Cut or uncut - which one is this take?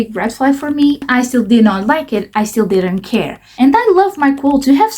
cut